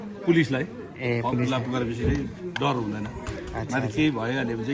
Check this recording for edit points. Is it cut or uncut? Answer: uncut